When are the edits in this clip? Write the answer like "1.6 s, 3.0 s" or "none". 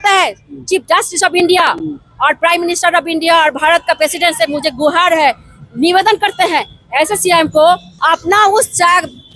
7.9 s

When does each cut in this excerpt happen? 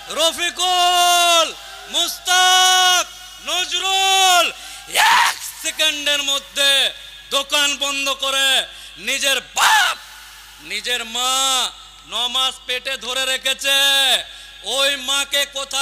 none

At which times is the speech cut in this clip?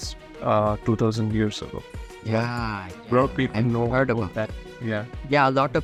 none

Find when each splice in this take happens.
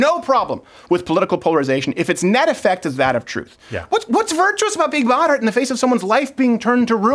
none

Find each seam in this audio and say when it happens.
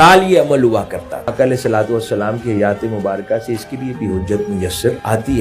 1.3 s

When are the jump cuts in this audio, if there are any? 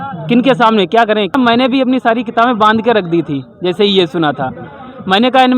1.3 s

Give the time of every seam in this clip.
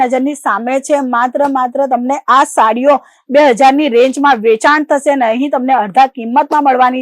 none

